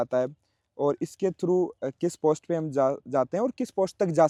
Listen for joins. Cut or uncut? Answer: uncut